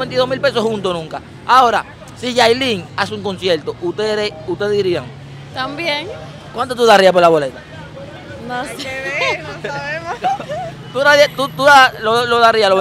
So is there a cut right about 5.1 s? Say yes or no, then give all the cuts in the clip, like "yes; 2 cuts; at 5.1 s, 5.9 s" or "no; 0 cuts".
no; 0 cuts